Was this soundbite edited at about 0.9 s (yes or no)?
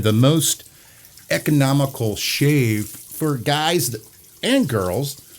no